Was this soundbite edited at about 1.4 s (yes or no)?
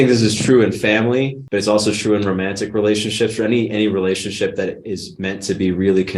yes